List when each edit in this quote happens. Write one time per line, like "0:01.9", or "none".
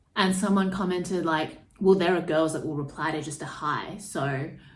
none